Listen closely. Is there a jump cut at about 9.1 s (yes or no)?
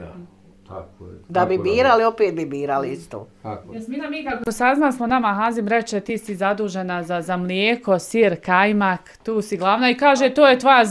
no